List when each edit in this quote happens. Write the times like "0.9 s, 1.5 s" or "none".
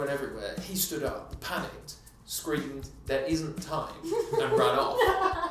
none